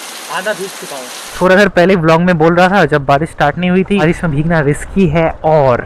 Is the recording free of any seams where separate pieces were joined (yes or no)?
no